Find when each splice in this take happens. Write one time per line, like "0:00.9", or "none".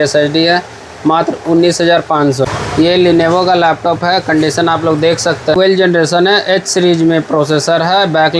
0:02.1
0:05.6